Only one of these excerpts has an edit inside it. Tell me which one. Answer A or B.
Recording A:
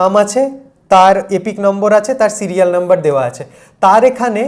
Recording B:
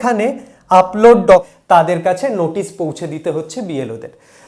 B